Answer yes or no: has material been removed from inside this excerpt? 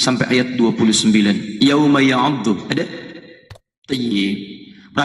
yes